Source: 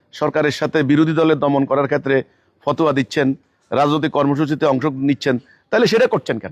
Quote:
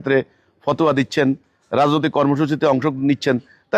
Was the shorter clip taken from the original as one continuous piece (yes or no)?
yes